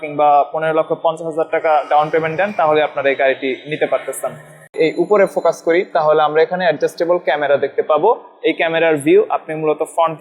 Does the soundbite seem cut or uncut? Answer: cut